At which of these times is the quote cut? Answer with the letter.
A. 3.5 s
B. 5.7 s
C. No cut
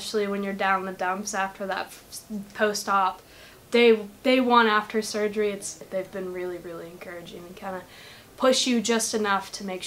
B